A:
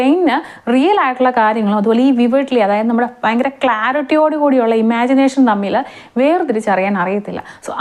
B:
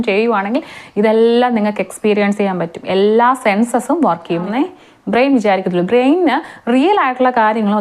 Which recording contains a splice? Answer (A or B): B